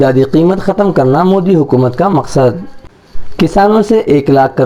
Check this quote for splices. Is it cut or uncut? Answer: uncut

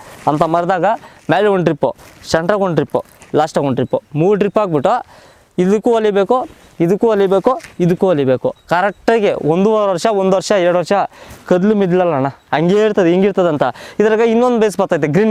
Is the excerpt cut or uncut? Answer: uncut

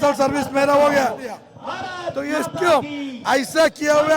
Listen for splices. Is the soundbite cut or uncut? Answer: cut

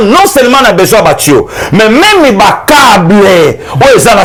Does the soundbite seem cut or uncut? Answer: uncut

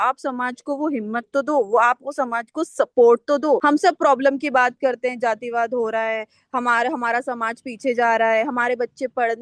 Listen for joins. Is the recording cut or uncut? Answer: cut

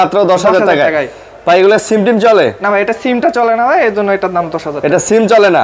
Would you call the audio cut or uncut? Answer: uncut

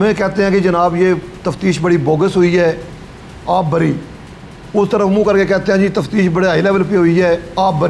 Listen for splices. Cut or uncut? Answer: uncut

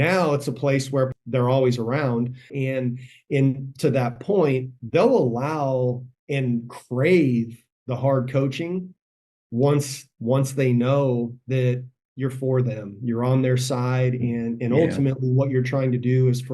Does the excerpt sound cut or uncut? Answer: cut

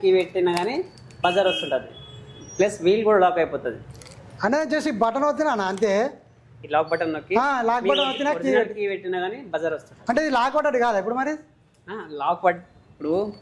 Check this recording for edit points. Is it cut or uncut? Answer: uncut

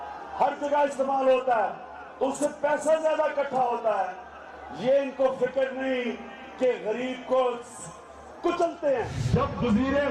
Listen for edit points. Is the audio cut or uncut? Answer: uncut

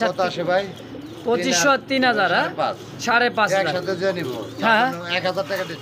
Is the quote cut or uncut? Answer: uncut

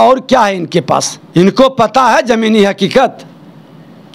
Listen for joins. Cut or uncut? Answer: cut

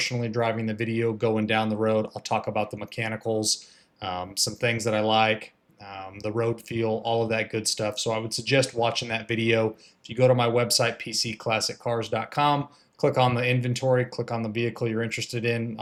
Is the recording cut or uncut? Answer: uncut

